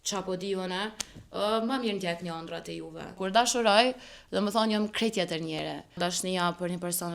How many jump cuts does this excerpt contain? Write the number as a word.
two